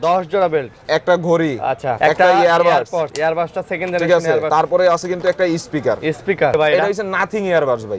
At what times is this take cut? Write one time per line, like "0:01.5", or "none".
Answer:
0:02.0
0:03.1
0:04.5
0:06.5